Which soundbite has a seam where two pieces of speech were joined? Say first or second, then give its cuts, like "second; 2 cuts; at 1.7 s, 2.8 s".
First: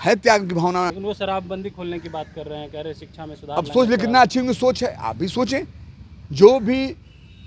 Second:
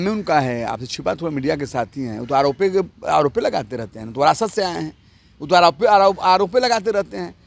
first; 1 cut; at 0.9 s